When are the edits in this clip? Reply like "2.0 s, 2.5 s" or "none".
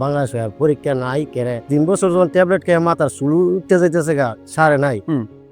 none